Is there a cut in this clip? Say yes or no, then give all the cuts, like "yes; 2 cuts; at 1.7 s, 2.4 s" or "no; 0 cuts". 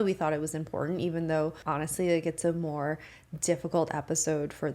yes; 1 cut; at 1.6 s